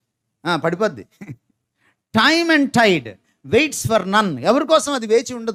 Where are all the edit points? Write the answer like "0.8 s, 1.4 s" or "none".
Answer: none

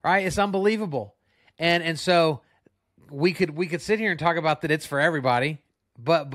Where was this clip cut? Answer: none

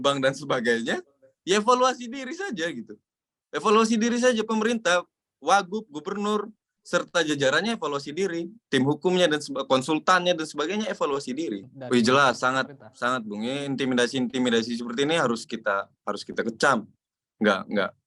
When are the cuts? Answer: 11.7 s

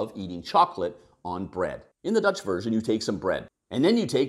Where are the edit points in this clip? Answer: 1.9 s, 3.5 s

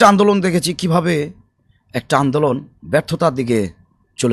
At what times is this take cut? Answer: none

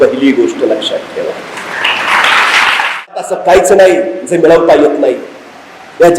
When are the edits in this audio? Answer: 3.3 s

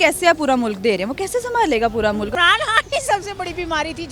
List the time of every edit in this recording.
2.3 s

